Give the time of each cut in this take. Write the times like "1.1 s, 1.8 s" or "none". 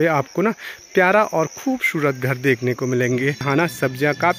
3.5 s